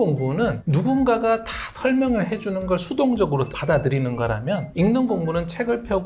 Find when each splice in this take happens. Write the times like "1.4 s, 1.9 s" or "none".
none